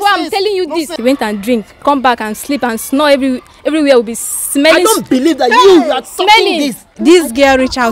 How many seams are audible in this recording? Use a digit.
2